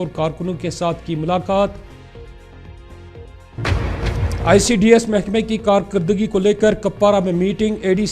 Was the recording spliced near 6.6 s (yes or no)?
no